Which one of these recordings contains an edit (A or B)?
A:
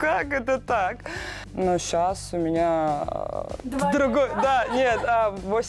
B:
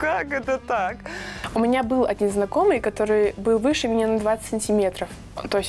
B